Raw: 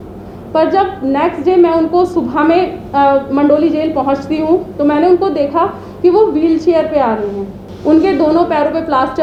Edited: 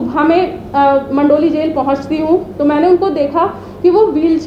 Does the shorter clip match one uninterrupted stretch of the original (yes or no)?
yes